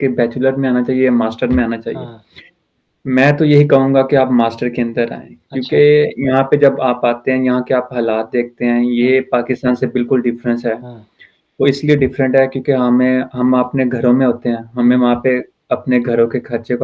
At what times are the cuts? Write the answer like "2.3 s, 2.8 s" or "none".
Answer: none

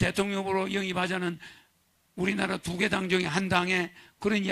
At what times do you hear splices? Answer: none

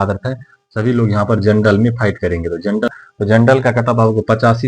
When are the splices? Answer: 2.9 s

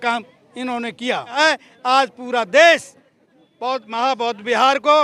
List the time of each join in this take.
1.4 s

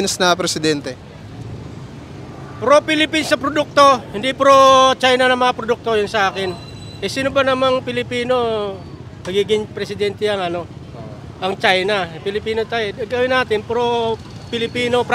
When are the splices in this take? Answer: none

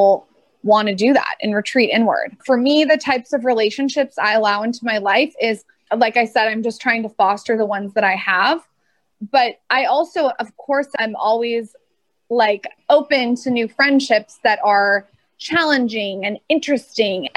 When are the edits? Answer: 2.3 s

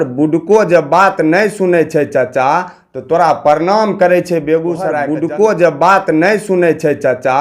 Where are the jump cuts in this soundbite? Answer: 5.0 s

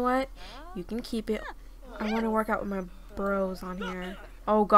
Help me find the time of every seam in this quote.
1.4 s

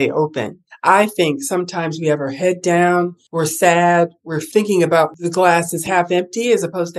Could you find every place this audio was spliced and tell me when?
3.2 s, 5.1 s

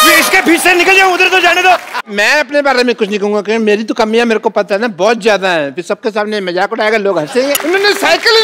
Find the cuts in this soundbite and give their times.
2.0 s, 7.6 s

